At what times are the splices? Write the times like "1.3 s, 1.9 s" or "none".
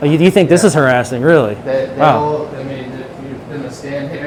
none